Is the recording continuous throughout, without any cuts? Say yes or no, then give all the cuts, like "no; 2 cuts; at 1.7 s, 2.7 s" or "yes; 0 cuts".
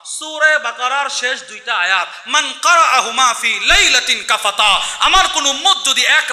yes; 0 cuts